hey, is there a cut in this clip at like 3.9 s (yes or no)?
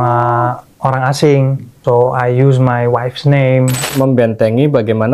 yes